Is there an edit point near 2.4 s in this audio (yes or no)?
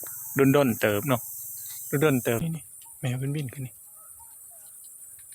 yes